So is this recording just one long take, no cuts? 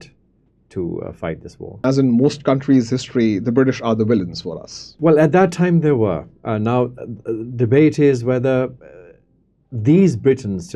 no; 2 cuts; at 1.8 s, 4.9 s

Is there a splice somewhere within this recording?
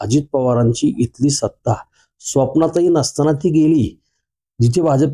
no; 0 cuts

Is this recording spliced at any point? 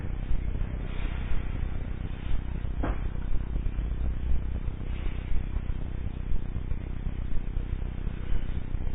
no; 0 cuts

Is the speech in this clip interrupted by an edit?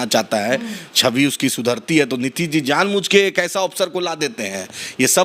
no; 0 cuts

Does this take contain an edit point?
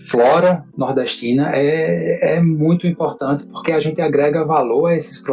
no; 0 cuts

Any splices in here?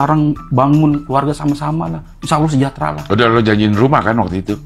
no; 0 cuts

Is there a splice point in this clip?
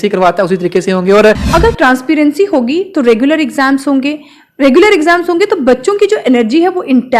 yes; 1 cut; at 1.4 s

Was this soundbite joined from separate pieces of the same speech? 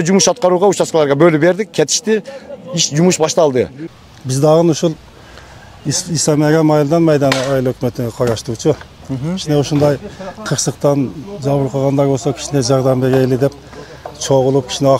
yes; 1 cut; at 3.8 s

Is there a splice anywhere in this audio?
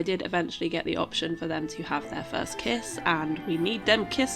no; 0 cuts

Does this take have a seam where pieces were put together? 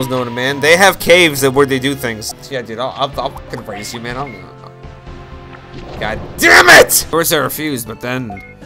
yes; 2 cuts; at 2.3 s, 7.0 s

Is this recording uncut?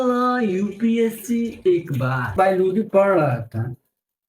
no; 1 cut; at 2.3 s

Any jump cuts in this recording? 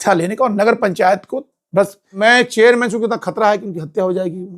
yes; 1 cut; at 2.2 s

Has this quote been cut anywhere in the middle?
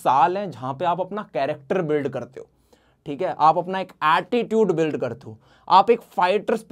no; 0 cuts

